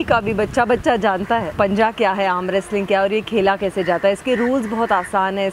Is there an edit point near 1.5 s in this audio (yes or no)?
yes